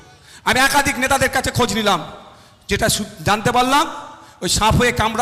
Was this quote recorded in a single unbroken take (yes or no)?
yes